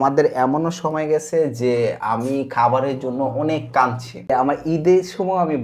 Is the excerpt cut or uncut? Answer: cut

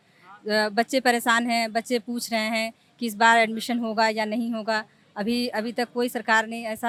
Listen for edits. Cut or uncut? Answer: uncut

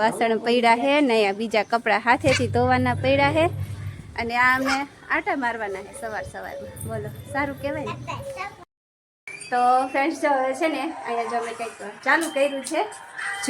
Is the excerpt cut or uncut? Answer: cut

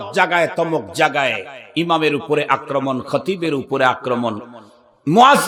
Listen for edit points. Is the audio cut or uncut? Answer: uncut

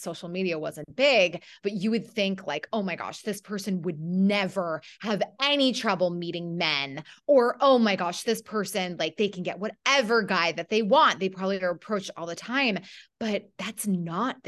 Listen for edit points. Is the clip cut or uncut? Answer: uncut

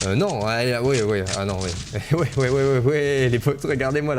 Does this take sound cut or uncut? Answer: uncut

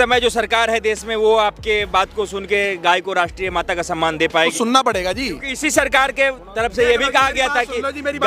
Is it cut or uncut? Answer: cut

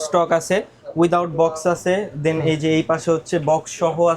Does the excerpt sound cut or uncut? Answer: uncut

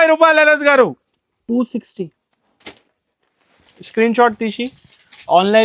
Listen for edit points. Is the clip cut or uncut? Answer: uncut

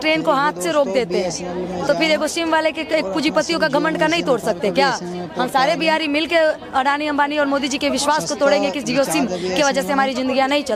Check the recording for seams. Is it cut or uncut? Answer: uncut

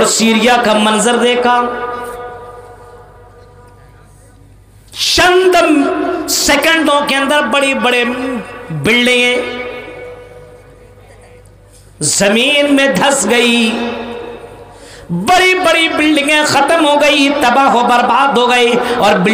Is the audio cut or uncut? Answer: uncut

